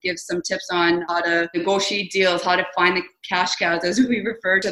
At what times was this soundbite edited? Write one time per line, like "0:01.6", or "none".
0:01.6